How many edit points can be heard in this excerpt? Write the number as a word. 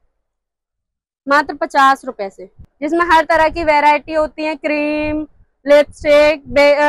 one